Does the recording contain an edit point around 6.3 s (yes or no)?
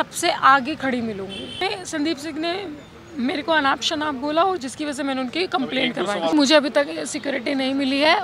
yes